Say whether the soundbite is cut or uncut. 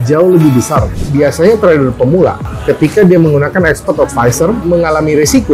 cut